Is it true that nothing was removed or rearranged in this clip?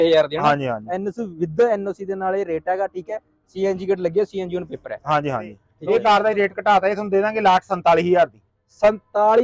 no; 1 cut; at 5.6 s

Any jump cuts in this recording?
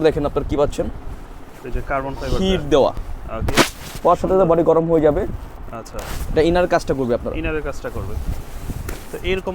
no; 0 cuts

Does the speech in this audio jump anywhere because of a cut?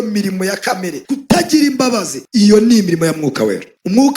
yes; 2 cuts; at 1.0 s, 2.1 s

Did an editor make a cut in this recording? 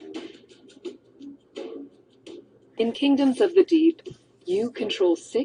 no; 0 cuts

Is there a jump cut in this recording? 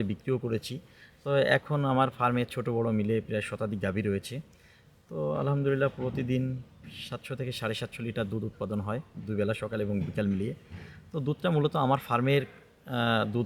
no; 0 cuts

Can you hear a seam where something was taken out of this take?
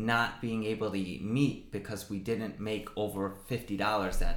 no; 0 cuts

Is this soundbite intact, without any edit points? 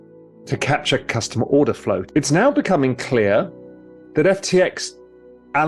no; 1 cut; at 2.1 s

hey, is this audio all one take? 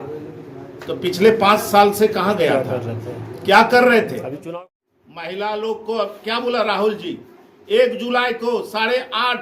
no; 1 cut; at 4.5 s

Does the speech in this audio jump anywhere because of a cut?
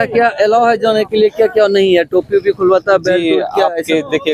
no; 0 cuts

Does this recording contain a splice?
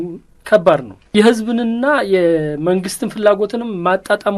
no; 0 cuts

